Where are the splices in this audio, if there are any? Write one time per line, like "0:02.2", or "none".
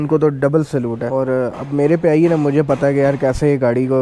0:01.1